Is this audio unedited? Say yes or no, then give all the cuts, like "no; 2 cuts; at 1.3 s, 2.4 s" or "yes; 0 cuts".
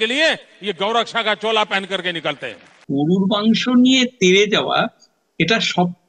no; 1 cut; at 2.7 s